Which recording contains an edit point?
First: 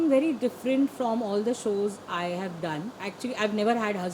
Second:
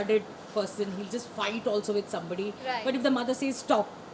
first; 1 cut; at 3.1 s

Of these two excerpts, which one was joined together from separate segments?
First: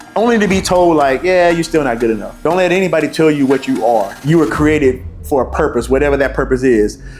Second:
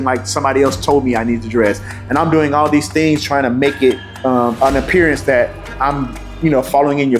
first; 2 cuts; at 2.3 s, 4.1 s

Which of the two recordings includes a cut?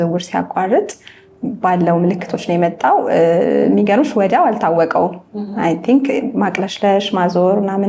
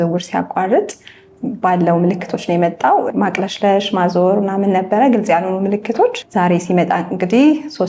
second; 2 cuts; at 3.1 s, 6.2 s

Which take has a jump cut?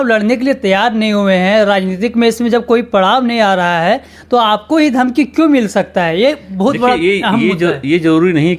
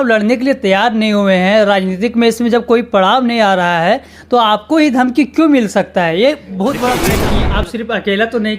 second; 1 cut; at 7.1 s

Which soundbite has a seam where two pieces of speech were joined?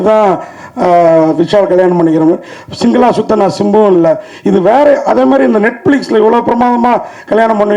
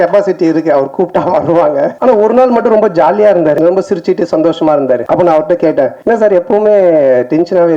second; 4 cuts; at 1.9 s, 3.6 s, 5.0 s, 6.0 s

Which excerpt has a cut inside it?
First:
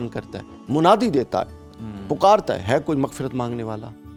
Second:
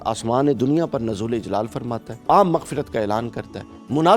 second; 1 cut; at 2.1 s

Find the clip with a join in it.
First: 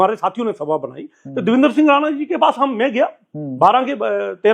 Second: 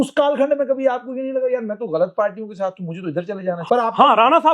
second; 1 cut; at 3.6 s

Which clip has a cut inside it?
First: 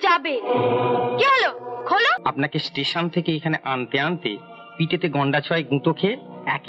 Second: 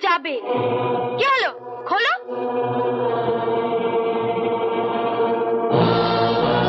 first; 1 cut; at 2.2 s

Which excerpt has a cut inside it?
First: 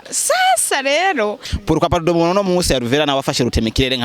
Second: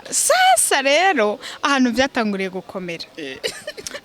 first; 1 cut; at 1.5 s

